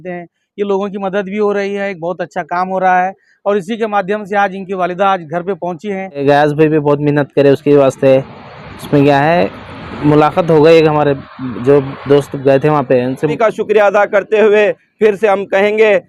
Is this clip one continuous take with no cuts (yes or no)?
no